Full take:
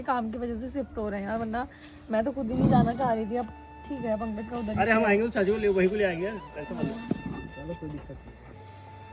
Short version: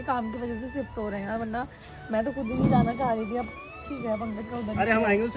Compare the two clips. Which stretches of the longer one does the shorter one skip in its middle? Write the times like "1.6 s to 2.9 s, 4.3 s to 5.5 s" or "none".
none

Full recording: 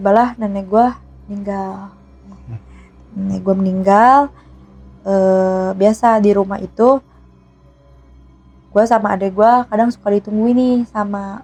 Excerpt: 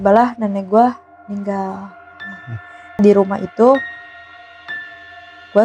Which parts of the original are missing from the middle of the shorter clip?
3.0 s to 6.2 s

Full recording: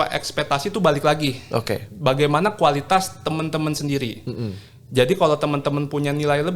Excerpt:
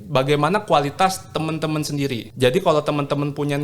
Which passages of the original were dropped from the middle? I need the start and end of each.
4.2 s to 4.8 s

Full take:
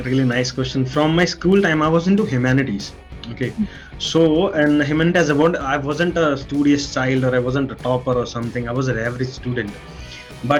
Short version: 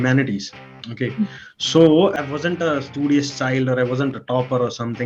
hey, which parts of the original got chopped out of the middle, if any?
4.5 s to 5.7 s

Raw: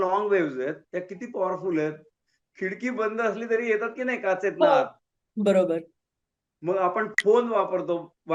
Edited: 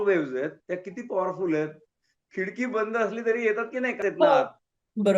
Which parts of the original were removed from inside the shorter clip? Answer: 4.2 s to 4.4 s

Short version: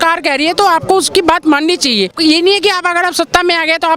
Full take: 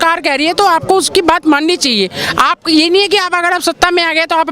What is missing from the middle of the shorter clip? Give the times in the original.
2.1 s to 2.6 s

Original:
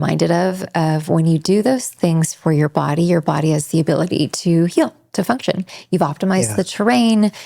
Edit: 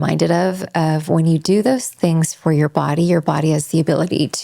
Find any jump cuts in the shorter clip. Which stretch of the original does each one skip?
none

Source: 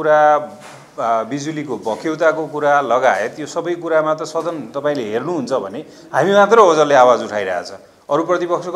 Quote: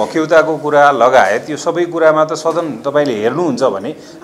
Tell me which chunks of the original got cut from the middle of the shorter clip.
none

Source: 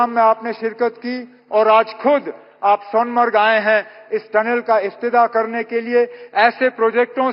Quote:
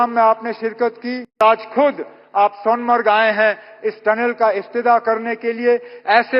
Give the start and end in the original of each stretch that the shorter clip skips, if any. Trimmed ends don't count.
1.4 s to 1.7 s

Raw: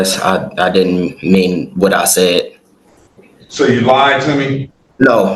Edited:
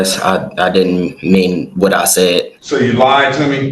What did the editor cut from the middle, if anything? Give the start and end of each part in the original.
2.6 s to 3.4 s

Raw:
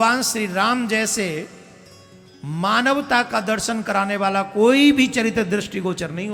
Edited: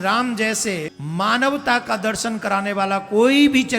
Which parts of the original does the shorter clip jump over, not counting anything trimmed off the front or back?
1.5 s to 2.4 s

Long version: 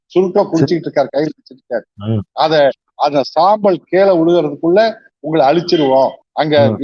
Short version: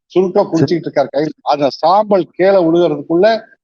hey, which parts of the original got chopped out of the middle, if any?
1.4 s to 2.9 s

